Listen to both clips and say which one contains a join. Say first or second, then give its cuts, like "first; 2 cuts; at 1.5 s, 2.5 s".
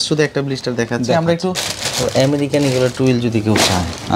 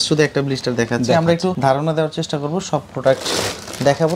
first; 1 cut; at 1.6 s